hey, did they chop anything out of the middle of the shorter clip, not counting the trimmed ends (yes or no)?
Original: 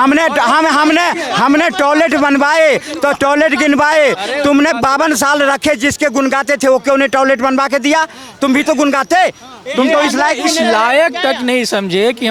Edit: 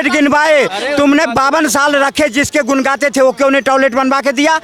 no